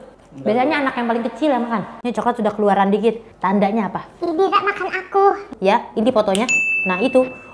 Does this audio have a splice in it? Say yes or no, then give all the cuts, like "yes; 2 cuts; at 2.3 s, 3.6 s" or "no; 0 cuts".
yes; 2 cuts; at 2.0 s, 5.5 s